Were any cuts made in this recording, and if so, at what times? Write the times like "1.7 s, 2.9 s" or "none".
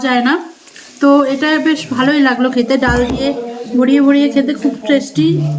none